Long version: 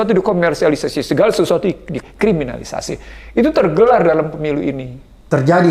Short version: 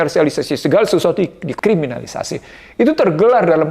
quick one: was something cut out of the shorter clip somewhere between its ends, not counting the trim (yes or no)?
yes